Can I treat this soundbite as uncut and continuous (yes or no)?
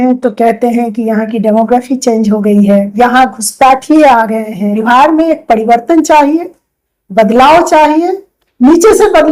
no